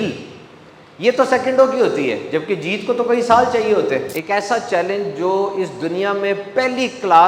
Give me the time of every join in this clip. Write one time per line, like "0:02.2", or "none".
0:04.1